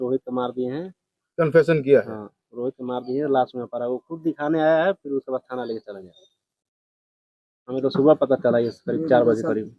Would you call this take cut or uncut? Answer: uncut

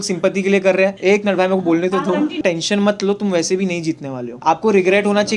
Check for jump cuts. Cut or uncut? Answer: cut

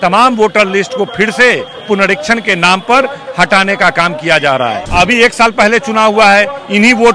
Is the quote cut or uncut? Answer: cut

